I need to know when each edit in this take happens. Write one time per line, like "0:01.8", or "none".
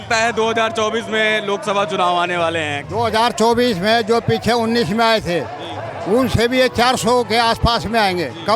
none

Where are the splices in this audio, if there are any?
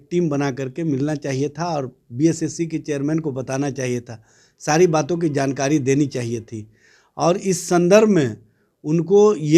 none

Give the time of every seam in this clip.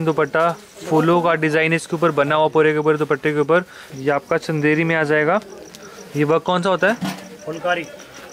0:03.8

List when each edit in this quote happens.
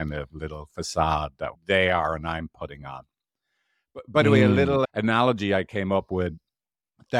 0:01.6

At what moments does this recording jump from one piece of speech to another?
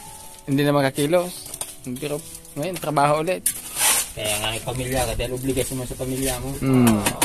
0:03.6

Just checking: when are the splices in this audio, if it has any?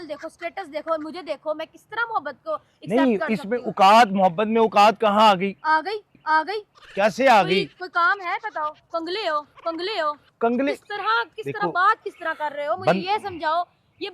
none

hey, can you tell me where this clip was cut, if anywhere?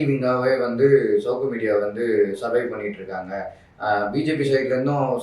none

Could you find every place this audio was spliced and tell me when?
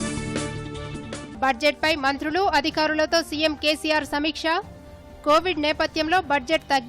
0:01.2

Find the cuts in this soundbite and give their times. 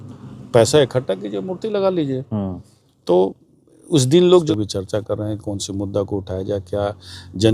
0:04.5

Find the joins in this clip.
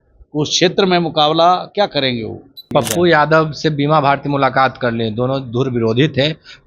0:02.6

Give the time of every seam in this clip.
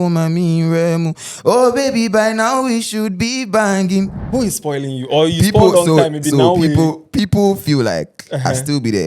0:04.2

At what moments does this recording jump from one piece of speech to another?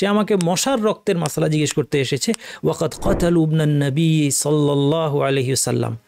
none

